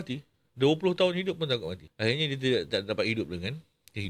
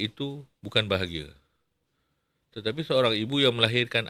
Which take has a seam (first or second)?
first